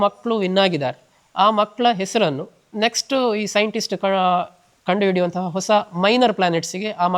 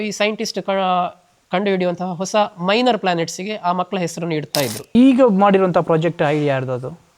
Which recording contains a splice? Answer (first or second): second